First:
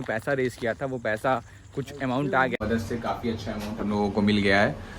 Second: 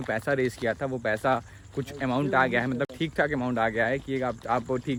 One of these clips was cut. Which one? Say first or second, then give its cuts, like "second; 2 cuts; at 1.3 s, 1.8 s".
first; 1 cut; at 2.6 s